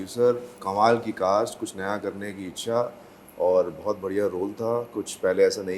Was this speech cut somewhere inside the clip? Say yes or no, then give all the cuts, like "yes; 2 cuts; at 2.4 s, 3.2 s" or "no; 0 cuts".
no; 0 cuts